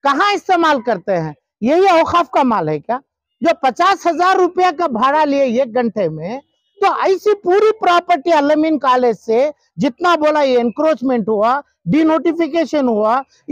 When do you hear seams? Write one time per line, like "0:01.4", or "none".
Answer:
none